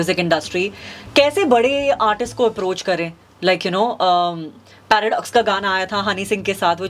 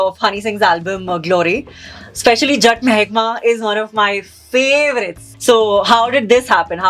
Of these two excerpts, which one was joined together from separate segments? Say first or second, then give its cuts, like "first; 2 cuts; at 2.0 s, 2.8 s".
second; 1 cut; at 5.2 s